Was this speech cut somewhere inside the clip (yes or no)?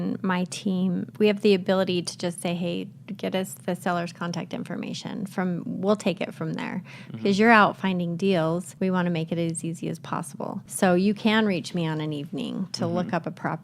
yes